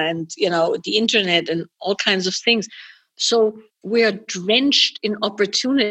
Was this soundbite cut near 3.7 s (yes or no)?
yes